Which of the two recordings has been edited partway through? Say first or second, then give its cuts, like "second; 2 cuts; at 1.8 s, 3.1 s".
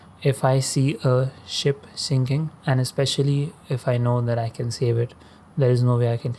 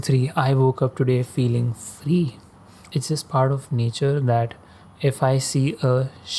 second; 1 cut; at 2.8 s